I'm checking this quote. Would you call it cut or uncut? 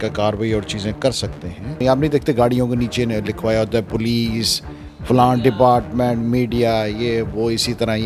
cut